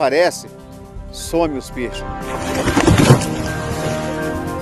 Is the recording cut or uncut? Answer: uncut